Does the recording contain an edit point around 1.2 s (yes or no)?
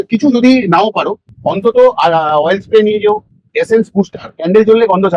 no